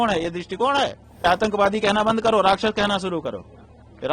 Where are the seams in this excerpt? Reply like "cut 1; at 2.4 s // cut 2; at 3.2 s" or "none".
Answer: cut 1; at 1.2 s